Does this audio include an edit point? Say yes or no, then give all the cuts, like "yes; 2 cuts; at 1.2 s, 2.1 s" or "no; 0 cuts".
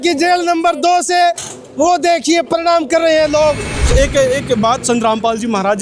yes; 1 cut; at 3.7 s